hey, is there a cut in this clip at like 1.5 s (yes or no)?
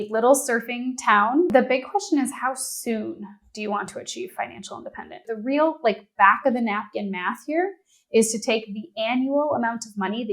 yes